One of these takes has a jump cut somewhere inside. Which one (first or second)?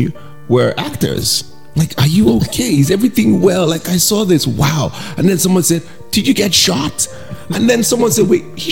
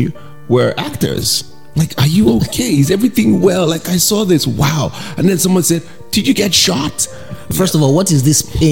second